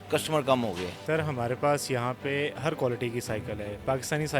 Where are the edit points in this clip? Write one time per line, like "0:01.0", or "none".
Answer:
0:00.9